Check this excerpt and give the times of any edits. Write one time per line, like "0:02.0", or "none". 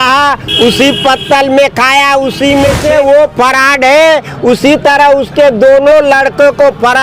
0:02.8